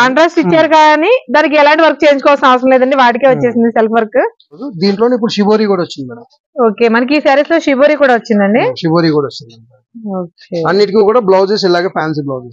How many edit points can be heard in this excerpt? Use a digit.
1